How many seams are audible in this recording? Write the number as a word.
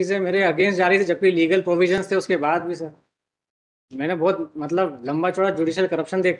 zero